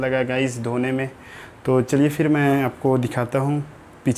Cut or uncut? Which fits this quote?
uncut